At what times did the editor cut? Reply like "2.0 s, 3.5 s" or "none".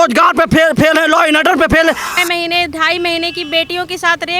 2.1 s